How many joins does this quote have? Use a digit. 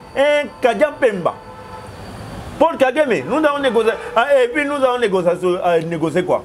0